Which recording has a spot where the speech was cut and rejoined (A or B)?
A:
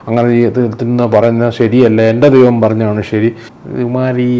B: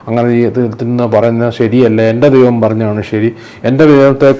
A